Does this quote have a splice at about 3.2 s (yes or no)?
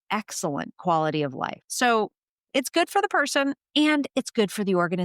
no